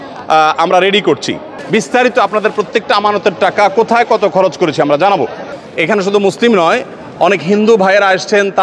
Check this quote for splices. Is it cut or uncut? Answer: cut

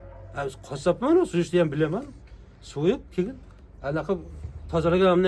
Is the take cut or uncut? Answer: uncut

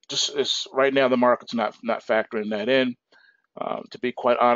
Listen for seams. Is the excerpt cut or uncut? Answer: cut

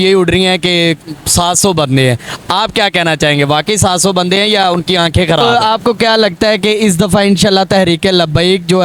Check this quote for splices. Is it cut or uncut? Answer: cut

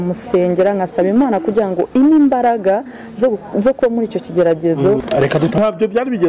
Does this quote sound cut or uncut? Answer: cut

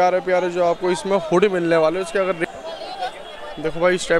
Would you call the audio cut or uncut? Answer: cut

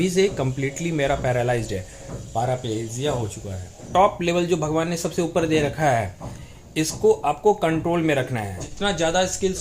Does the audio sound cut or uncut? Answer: cut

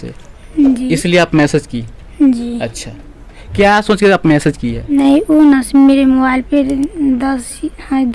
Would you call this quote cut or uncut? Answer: cut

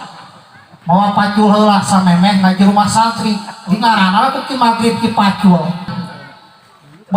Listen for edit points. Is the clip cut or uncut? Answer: cut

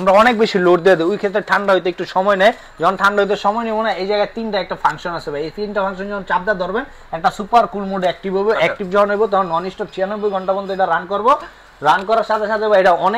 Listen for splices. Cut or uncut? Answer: uncut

